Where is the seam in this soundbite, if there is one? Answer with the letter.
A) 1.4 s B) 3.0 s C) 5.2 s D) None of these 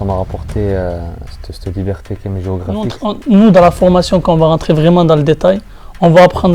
B